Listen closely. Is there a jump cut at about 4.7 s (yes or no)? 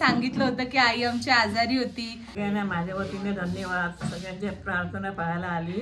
no